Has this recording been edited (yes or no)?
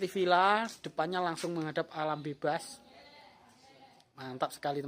no